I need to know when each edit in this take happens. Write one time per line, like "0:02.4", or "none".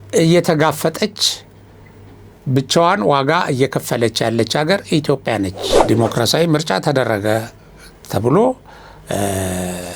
0:05.8